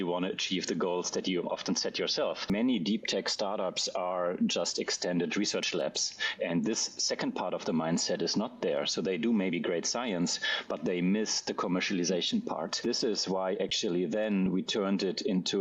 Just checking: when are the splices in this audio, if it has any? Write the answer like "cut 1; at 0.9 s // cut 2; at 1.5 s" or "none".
cut 1; at 2.5 s // cut 2; at 12.8 s